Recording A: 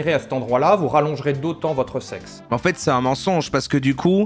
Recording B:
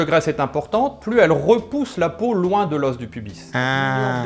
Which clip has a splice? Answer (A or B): A